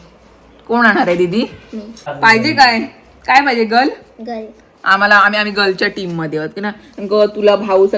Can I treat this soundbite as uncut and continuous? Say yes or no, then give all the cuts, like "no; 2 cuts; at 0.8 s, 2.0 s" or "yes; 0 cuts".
no; 1 cut; at 2.0 s